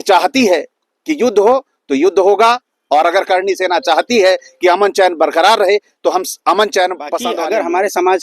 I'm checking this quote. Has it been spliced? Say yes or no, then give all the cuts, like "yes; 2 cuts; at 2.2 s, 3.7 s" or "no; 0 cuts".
yes; 1 cut; at 7.2 s